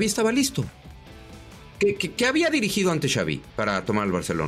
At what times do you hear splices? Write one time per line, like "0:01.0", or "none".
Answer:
none